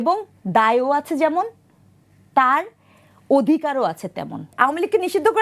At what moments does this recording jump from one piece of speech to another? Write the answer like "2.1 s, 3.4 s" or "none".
4.4 s

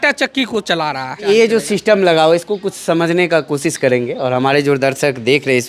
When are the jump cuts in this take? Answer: 1.1 s

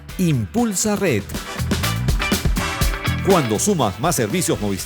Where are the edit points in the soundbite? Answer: 1.4 s, 2.9 s

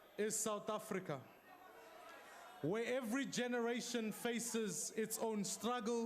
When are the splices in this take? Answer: 5.1 s

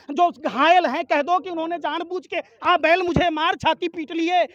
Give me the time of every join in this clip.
none

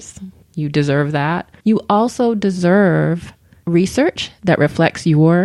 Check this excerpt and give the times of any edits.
1.5 s

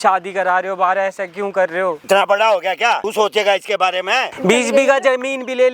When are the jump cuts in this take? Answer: 2.0 s, 3.0 s, 4.3 s

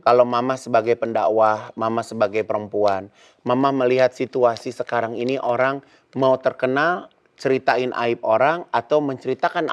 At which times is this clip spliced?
none

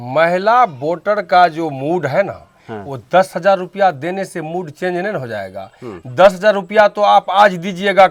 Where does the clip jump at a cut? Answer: none

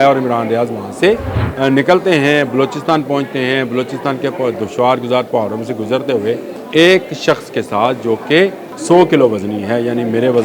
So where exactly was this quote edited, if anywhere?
1.4 s, 6.5 s, 8.7 s

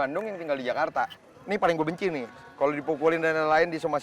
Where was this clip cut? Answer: 1.2 s

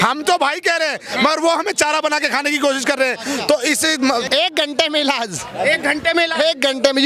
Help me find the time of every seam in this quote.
4.3 s

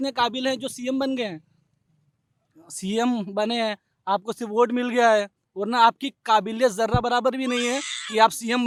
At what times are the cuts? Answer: none

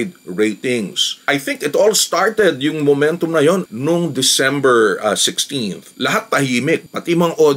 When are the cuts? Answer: 1.2 s, 5.8 s

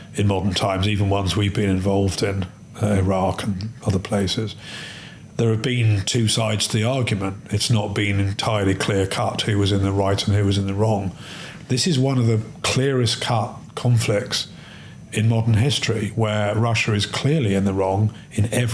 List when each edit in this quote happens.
none

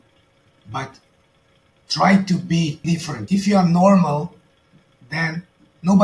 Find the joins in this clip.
3.2 s

